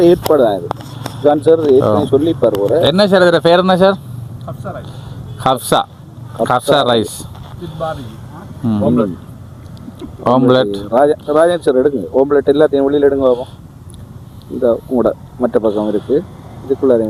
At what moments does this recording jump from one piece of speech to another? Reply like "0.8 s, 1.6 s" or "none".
none